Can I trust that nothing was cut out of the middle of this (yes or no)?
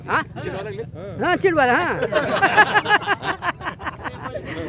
yes